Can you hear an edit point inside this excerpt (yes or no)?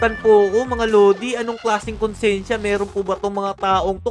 no